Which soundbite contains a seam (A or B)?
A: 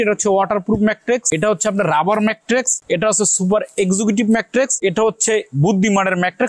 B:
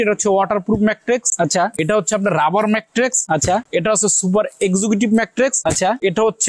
A